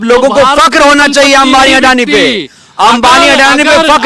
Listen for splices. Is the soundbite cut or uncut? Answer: uncut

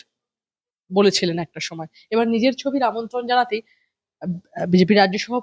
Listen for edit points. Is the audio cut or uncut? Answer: uncut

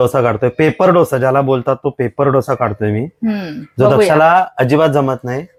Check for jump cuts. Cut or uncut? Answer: uncut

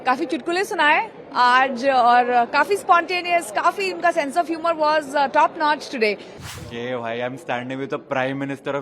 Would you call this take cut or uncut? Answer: cut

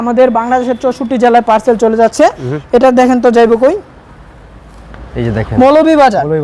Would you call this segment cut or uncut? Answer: uncut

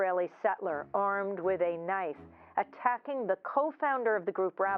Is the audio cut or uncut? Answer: uncut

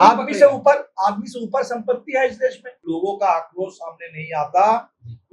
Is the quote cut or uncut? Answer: cut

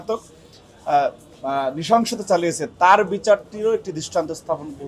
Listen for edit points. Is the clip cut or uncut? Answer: uncut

